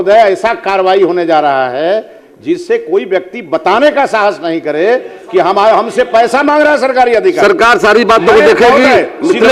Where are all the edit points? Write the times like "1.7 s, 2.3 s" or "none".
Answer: none